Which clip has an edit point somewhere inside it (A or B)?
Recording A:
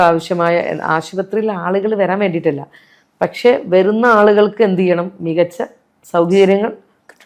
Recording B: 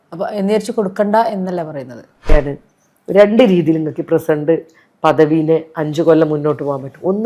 B